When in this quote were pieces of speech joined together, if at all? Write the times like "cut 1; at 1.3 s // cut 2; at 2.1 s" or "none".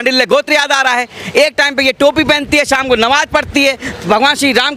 none